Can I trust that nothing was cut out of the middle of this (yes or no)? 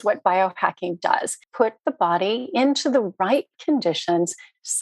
no